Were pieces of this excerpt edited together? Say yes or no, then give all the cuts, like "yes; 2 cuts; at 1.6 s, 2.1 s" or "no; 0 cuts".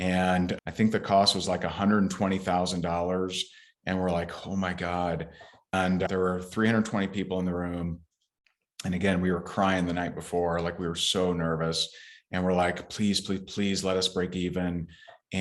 yes; 1 cut; at 5.7 s